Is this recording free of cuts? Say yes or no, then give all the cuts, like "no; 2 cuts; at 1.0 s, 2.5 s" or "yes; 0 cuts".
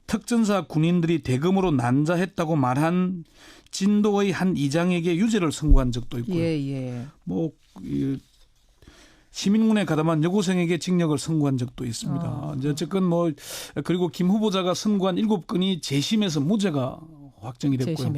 no; 1 cut; at 1.7 s